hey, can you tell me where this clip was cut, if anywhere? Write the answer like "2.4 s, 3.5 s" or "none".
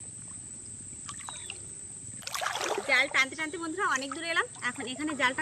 2.2 s